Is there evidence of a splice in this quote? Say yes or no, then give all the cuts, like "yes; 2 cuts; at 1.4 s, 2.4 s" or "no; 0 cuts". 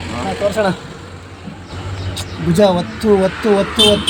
no; 0 cuts